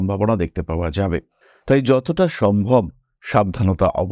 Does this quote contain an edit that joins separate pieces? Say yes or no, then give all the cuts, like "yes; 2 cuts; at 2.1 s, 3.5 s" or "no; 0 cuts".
no; 0 cuts